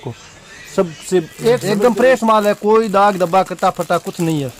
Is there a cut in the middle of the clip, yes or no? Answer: yes